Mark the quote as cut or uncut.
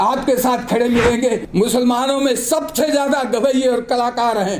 cut